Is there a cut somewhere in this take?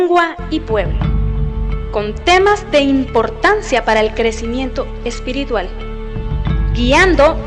yes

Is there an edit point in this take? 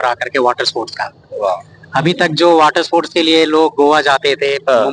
no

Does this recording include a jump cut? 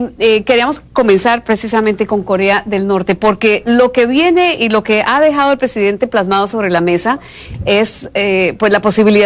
no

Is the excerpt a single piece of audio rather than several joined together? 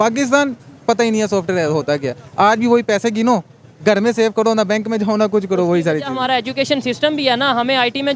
yes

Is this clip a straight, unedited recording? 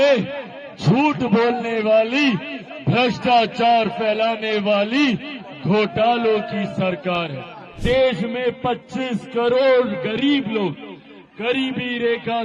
no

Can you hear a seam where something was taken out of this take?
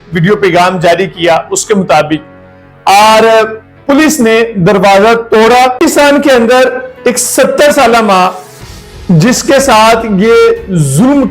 yes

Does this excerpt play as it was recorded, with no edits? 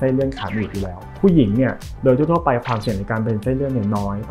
yes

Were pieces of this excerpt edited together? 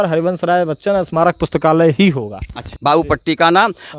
yes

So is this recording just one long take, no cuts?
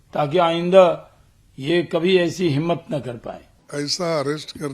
yes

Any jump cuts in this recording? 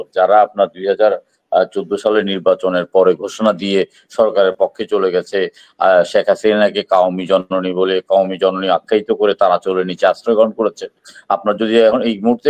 no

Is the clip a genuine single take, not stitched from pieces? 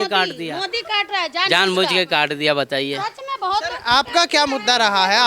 yes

